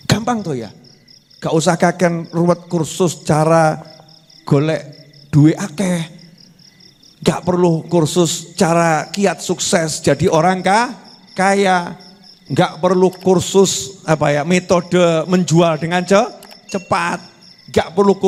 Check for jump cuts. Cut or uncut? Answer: uncut